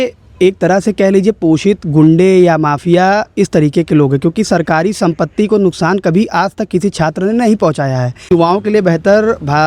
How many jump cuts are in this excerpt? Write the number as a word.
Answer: one